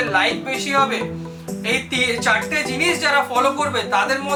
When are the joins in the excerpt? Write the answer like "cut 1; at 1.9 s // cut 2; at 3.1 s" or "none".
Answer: none